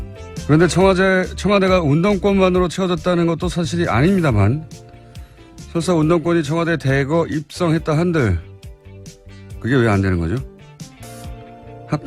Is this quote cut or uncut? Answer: uncut